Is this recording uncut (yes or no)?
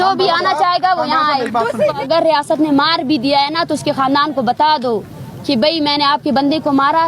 no